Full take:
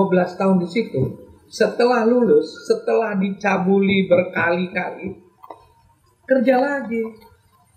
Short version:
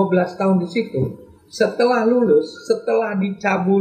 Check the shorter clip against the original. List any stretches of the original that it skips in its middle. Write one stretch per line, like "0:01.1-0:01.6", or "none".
none